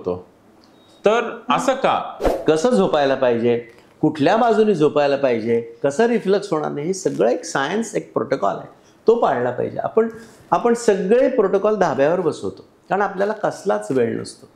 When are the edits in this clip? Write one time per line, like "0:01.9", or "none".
0:02.2